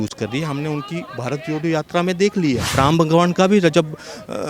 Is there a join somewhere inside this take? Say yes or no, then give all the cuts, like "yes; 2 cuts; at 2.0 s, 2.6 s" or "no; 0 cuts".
yes; 1 cut; at 2.7 s